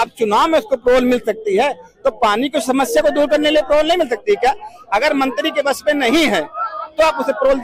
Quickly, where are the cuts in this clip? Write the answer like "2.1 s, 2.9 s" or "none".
none